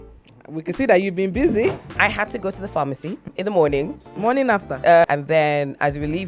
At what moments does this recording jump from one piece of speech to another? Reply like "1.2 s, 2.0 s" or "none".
1.9 s, 3.3 s, 4.1 s, 5.1 s

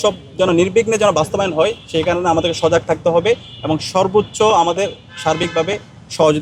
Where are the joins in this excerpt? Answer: none

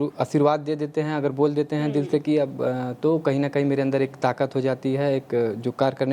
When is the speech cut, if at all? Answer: none

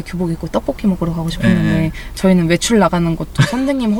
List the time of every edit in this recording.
none

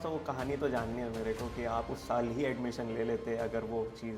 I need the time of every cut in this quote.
none

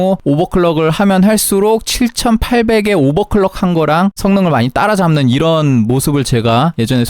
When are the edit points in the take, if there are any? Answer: none

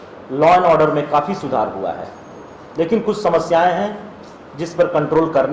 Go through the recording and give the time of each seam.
none

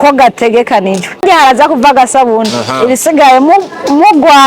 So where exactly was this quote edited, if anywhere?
1.2 s

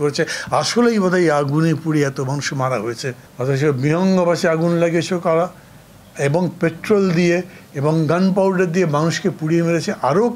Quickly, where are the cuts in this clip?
3.2 s

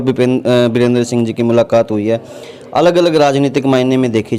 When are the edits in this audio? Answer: none

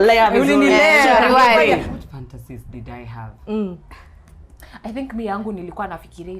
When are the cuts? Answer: 1.9 s

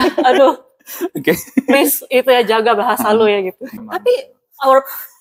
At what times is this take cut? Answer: 3.8 s

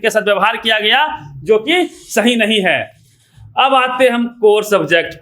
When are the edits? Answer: none

